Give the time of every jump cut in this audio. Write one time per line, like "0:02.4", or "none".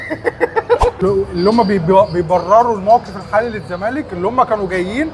0:01.0